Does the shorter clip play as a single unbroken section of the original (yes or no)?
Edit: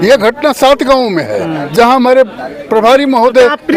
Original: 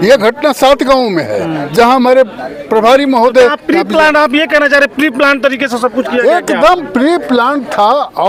yes